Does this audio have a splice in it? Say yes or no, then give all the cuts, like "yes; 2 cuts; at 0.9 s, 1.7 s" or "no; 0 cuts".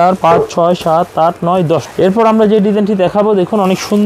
yes; 1 cut; at 1.9 s